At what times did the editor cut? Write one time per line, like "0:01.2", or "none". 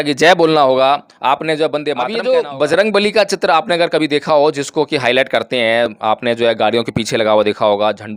0:02.1